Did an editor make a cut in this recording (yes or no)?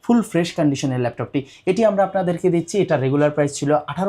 no